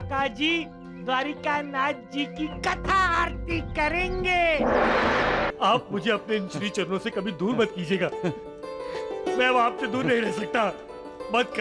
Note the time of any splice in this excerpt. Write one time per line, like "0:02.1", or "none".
0:05.5